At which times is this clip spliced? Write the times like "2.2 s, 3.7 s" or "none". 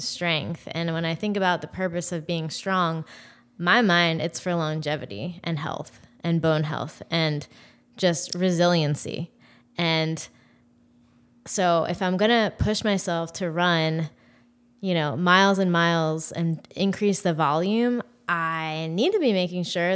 none